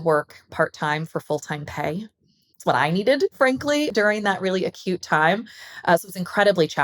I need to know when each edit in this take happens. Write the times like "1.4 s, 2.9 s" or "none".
3.9 s